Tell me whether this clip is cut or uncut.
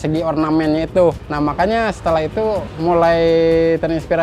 cut